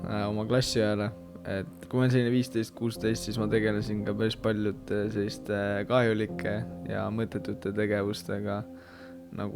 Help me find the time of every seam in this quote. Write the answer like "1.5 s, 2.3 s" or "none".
1.7 s